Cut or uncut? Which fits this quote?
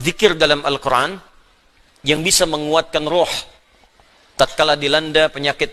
uncut